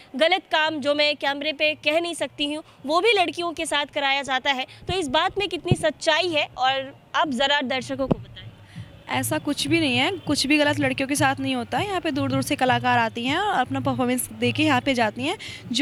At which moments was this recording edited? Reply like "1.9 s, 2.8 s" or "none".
none

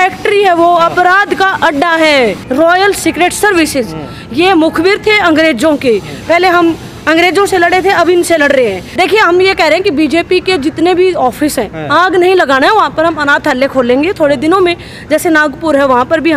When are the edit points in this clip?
2.4 s, 8.8 s

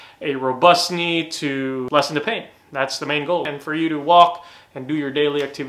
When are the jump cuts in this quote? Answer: 1.9 s, 3.4 s

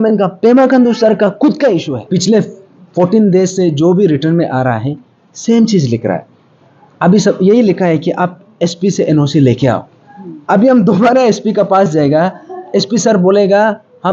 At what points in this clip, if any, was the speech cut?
2.0 s

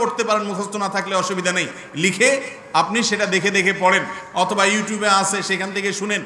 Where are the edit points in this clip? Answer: none

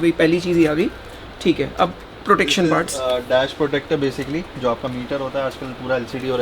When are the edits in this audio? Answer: none

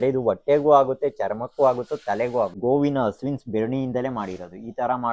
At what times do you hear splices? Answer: 2.6 s

